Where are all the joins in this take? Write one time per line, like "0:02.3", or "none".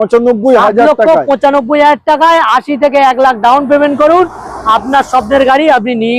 none